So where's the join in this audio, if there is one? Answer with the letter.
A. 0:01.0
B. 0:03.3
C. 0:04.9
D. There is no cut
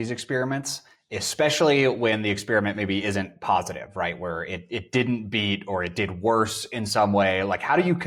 D